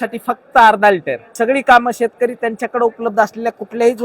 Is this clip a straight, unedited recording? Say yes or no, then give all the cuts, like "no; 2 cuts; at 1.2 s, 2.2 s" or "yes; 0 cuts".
no; 1 cut; at 1.3 s